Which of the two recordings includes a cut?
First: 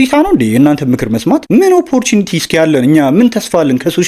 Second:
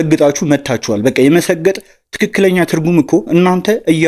first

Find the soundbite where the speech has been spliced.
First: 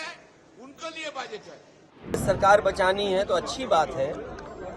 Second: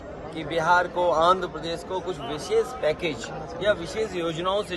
first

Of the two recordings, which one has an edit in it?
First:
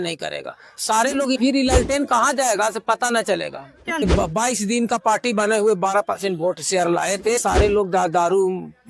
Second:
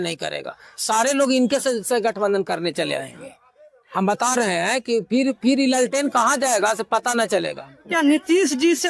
first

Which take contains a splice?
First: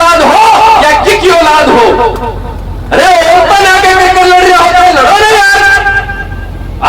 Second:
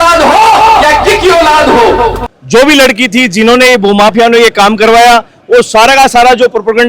second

